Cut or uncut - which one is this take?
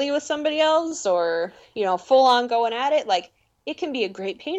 uncut